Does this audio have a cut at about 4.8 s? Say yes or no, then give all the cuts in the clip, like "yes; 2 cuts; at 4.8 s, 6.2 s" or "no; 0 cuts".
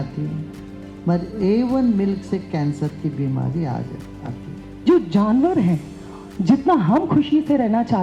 yes; 1 cut; at 4.8 s